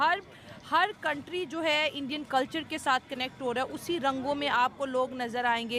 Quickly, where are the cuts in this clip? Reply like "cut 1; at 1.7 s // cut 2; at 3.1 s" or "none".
none